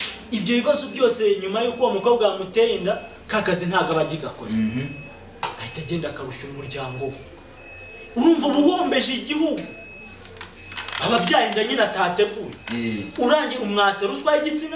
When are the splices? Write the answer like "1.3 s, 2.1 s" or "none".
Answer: none